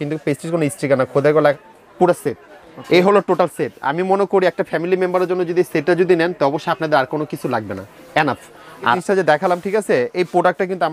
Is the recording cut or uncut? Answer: cut